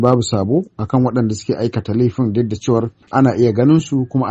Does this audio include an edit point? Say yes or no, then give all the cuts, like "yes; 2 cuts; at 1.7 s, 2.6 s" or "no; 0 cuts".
yes; 1 cut; at 3.0 s